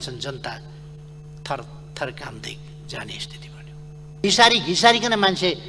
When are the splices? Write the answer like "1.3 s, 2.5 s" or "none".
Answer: 4.2 s